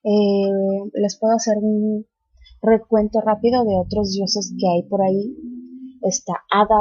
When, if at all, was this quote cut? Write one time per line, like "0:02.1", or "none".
0:04.1